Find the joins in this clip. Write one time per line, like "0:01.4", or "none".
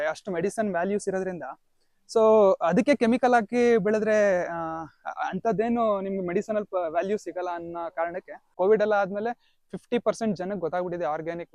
0:08.5